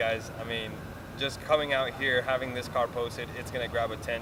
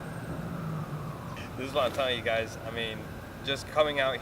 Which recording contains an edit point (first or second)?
second